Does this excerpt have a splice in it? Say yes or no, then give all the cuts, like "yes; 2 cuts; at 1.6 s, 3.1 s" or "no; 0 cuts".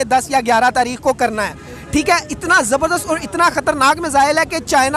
no; 0 cuts